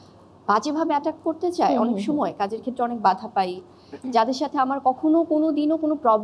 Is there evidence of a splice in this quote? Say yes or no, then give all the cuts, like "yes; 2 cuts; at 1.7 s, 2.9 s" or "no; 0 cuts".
no; 0 cuts